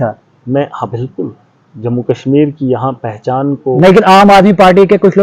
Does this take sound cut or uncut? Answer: uncut